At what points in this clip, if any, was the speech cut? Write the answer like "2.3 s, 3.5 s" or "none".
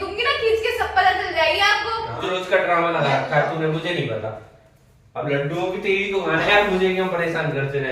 2.2 s